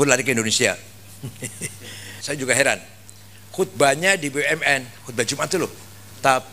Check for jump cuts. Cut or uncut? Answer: cut